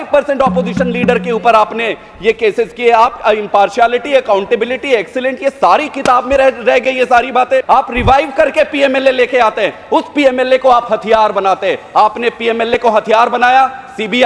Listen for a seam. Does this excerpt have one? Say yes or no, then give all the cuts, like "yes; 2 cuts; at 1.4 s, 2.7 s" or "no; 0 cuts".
yes; 1 cut; at 7.6 s